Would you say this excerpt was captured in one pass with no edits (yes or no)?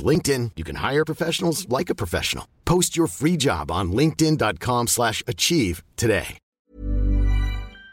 no